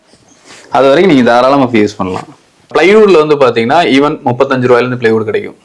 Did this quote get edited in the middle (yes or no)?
yes